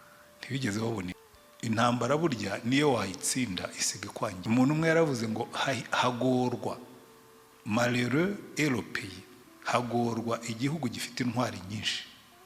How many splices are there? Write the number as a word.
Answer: two